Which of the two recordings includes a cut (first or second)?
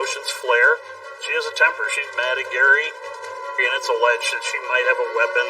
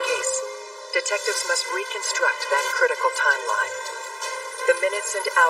first